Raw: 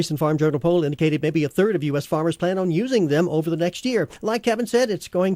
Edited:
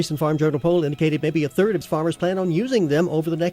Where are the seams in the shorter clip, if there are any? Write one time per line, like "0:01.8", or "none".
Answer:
0:01.8